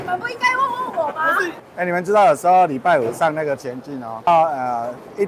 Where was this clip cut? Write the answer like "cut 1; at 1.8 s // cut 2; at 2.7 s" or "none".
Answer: cut 1; at 1.6 s // cut 2; at 4.3 s